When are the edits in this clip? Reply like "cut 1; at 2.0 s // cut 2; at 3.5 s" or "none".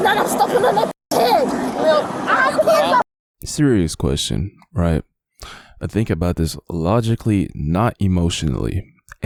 none